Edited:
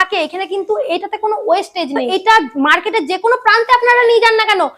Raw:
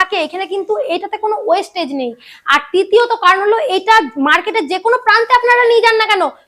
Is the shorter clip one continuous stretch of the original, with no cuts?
no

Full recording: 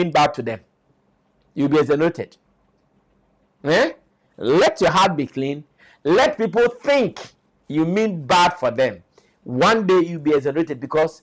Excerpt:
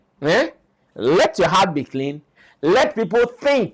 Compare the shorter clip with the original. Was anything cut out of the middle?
no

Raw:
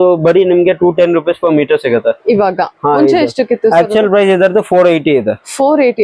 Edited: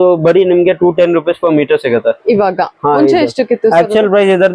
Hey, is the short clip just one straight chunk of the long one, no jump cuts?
yes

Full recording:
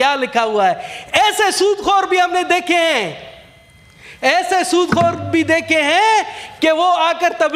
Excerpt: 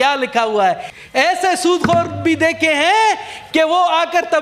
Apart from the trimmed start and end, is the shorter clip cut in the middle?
yes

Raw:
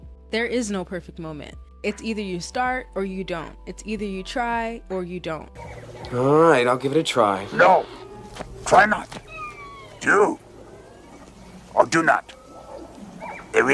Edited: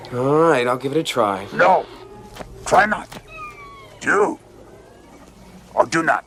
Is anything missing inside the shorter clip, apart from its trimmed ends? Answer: no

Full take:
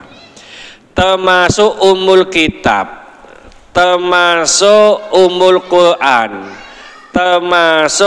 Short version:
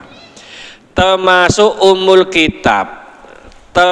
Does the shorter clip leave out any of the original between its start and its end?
no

